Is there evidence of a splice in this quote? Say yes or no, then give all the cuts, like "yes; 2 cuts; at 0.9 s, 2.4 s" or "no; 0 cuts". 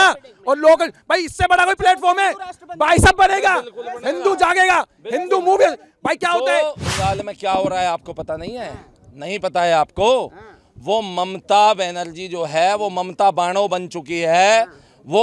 yes; 1 cut; at 6.8 s